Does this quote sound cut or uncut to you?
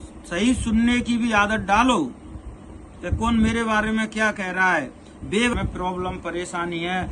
cut